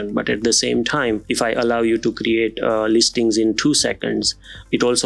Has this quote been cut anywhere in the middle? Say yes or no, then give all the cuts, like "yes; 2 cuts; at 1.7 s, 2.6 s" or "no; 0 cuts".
yes; 1 cut; at 1.3 s